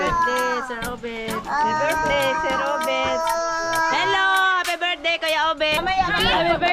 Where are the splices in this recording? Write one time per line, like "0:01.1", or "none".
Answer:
0:05.8